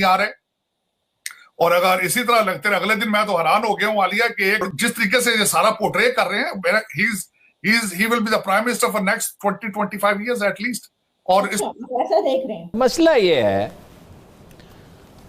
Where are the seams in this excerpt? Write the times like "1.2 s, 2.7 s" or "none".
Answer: 4.7 s, 12.8 s